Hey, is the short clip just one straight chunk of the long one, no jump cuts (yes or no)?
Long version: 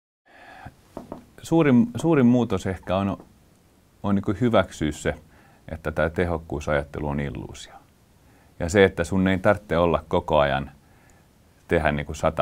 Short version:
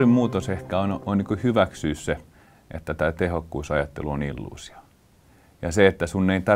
no